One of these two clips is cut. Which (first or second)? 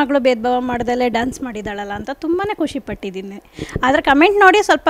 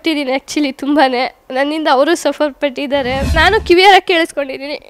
second